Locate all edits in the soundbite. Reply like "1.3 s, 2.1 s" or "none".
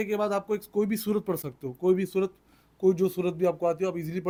none